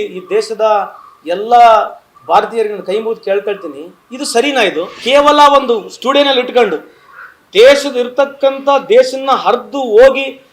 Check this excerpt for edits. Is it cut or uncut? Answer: cut